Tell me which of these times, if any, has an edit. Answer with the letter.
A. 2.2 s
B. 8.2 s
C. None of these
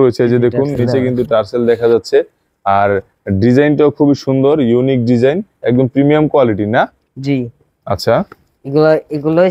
C